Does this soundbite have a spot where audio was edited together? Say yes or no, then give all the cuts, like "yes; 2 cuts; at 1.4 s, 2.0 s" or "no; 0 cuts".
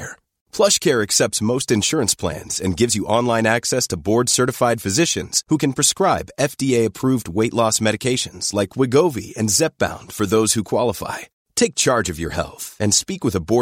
no; 0 cuts